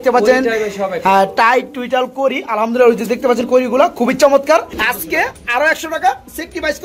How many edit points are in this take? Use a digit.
1